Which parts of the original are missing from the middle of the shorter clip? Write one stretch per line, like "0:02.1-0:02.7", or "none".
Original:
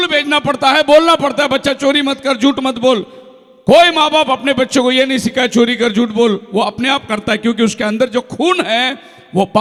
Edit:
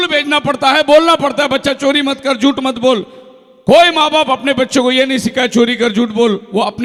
none